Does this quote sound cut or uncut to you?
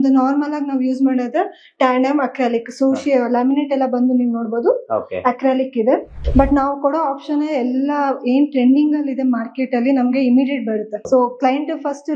cut